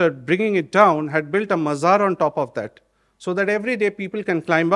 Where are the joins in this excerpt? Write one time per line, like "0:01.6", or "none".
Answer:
none